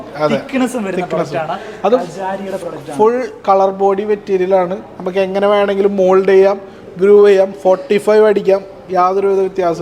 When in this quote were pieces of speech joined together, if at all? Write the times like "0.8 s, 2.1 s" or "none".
none